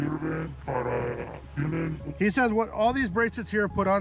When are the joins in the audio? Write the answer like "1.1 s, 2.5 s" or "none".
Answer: none